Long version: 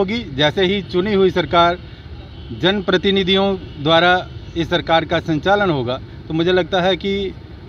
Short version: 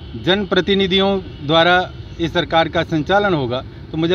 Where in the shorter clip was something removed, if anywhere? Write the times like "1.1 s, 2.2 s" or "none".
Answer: none